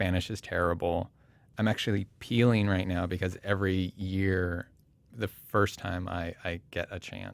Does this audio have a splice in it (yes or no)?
yes